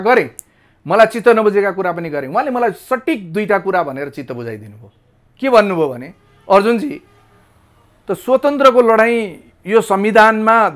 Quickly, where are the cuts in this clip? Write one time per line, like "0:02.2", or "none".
none